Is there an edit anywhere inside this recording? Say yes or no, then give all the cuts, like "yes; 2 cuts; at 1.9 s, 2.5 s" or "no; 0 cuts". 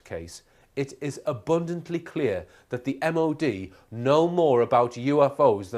no; 0 cuts